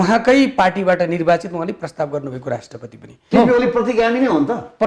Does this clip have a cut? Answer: yes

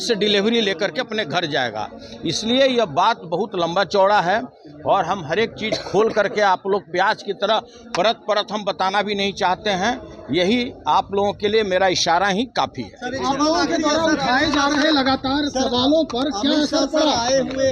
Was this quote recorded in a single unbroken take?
yes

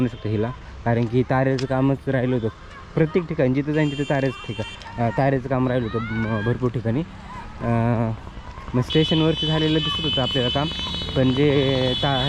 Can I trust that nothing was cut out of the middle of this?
yes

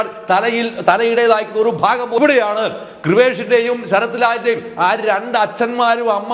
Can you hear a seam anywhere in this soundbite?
yes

